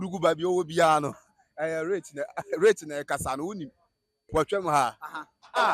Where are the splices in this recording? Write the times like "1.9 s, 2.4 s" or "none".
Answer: 4.2 s